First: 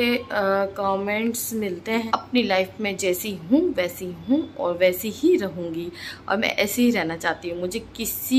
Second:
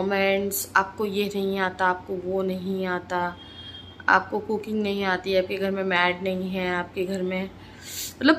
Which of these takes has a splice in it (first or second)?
first